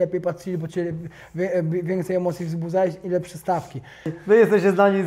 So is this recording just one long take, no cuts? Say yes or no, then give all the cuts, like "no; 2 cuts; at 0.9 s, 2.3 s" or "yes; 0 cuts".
no; 1 cut; at 4.1 s